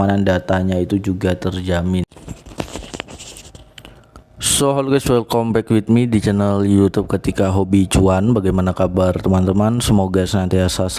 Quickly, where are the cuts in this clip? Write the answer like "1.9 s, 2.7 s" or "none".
2.0 s